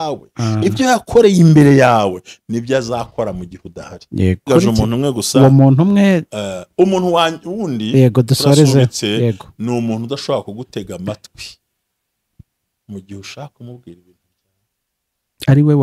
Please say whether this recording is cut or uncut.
cut